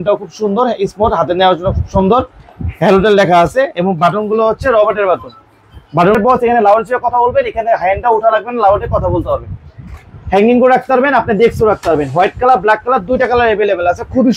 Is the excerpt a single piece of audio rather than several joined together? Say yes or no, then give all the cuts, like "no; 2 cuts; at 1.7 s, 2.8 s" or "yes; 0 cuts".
no; 1 cut; at 6.1 s